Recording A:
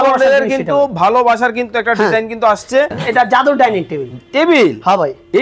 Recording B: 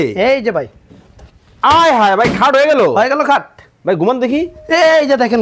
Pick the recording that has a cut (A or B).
A